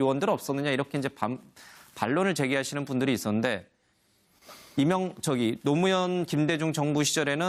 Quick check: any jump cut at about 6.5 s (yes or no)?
yes